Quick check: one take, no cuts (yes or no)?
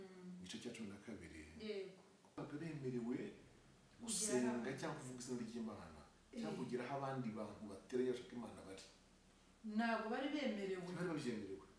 no